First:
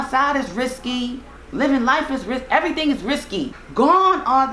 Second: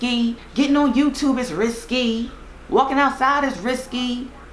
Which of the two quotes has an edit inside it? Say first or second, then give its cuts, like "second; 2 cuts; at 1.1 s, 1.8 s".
first; 1 cut; at 3.6 s